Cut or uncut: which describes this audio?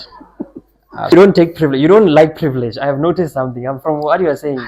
cut